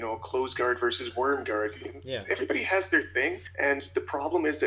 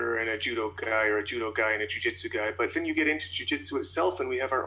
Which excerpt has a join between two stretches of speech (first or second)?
first